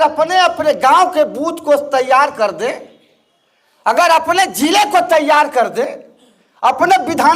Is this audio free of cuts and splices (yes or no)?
yes